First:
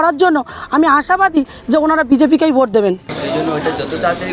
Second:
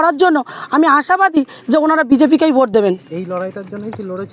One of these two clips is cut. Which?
first; 1 cut; at 3.1 s

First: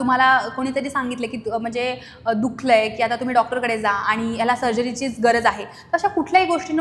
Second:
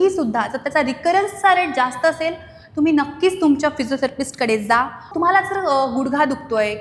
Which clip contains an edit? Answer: second; 1 cut; at 5.1 s

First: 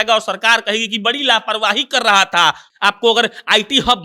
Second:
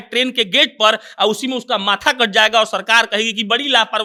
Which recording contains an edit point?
first; 1 cut; at 2.7 s

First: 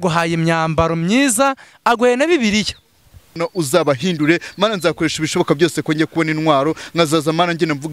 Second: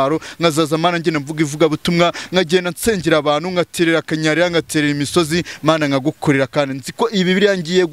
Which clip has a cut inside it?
first; 1 cut; at 3.4 s

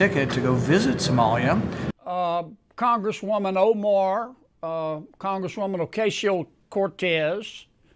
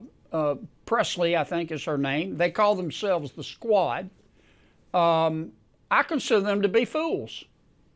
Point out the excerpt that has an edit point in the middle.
first; 1 cut; at 1.8 s

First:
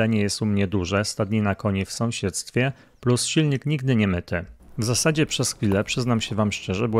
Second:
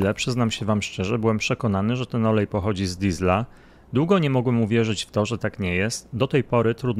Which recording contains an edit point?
first; 1 cut; at 4.7 s

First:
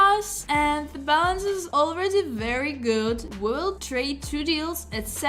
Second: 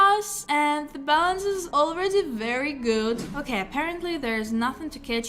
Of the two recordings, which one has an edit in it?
second; 1 cut; at 3.3 s

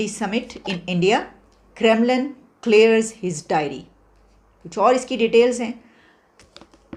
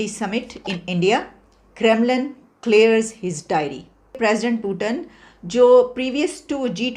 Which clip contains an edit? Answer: second; 1 cut; at 4.2 s

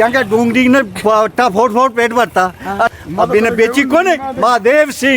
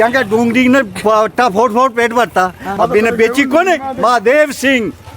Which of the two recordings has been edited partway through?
second; 1 cut; at 2.6 s

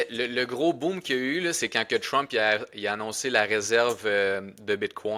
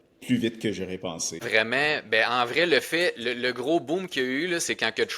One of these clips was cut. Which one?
second; 1 cut; at 1.4 s

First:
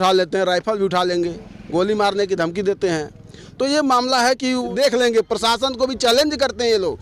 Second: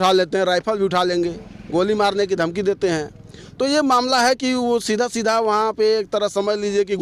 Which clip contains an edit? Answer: first; 1 cut; at 4.7 s

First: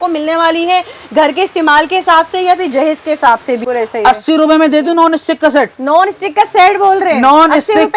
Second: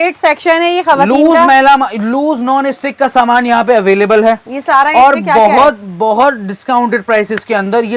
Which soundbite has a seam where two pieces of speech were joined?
first; 1 cut; at 3.6 s

